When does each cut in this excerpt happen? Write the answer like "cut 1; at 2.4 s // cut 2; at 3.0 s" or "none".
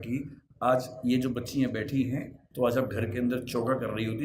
cut 1; at 2.4 s